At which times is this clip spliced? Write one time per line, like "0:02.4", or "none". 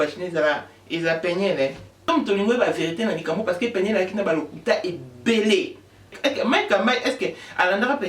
0:02.1
0:06.2